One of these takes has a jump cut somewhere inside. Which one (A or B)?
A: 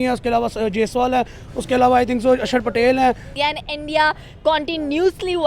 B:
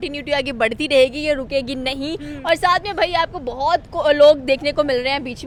A